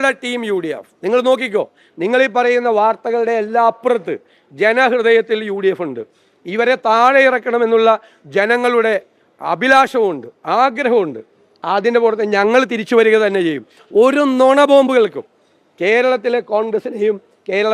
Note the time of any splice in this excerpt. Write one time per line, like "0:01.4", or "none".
0:13.8

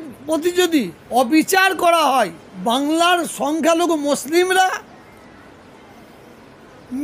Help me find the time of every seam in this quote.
0:01.0
0:02.4

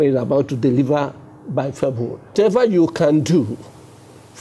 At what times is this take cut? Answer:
0:02.3

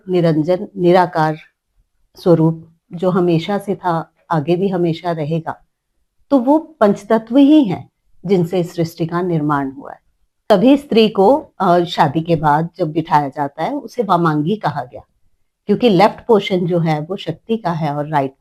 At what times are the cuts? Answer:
0:10.5

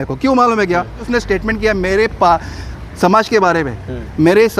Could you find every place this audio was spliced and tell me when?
0:01.0

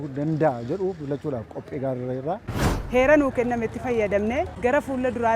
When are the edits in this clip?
0:02.6

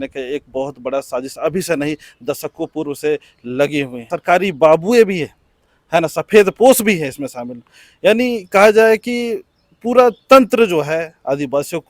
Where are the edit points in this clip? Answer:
0:04.1

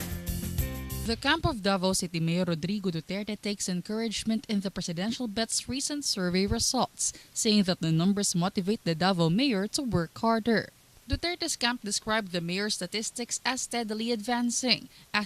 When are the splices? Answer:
0:01.5

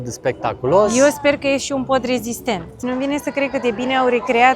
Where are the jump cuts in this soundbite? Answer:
0:02.7

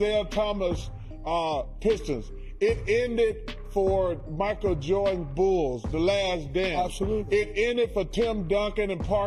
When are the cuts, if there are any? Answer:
none

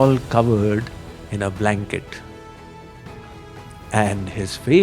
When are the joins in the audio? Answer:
0:02.1
0:03.7

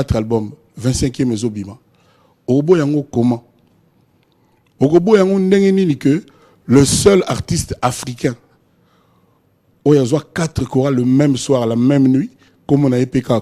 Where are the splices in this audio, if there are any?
none

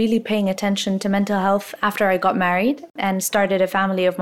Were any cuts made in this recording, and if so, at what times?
0:02.9

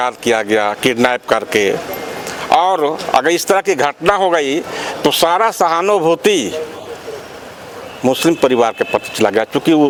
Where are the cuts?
none

